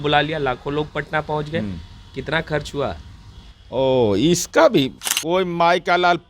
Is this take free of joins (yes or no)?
no